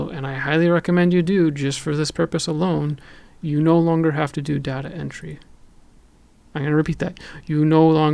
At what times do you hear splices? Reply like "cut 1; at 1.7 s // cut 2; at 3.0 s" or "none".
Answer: none